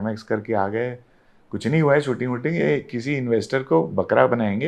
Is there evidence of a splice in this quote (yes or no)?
no